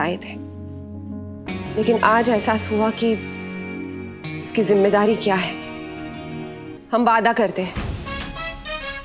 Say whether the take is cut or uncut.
cut